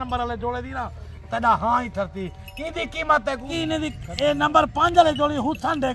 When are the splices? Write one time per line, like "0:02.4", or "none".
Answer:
0:03.5